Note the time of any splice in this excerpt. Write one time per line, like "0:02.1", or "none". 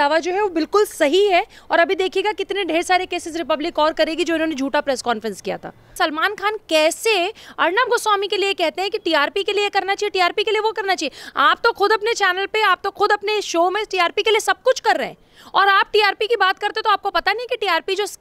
0:05.9